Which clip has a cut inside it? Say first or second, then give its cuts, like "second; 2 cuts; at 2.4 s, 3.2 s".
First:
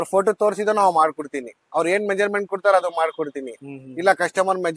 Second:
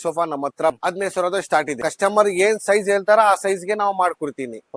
second; 2 cuts; at 0.8 s, 1.8 s